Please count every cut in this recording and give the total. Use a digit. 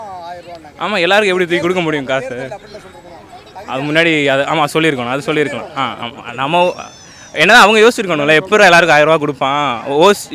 1